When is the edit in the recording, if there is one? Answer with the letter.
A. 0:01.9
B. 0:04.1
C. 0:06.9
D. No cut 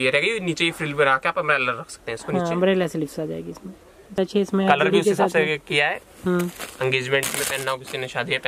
B